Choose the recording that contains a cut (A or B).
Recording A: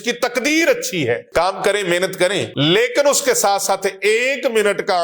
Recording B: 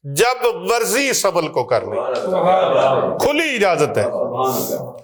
A